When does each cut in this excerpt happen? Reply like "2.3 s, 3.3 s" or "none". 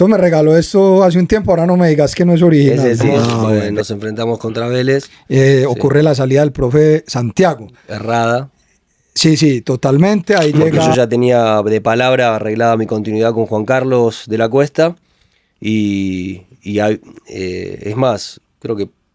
3.7 s, 10.9 s